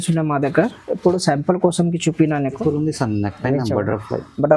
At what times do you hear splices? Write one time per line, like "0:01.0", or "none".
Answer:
0:02.6